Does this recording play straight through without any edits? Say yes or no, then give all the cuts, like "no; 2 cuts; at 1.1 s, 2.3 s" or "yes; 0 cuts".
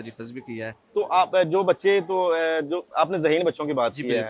yes; 0 cuts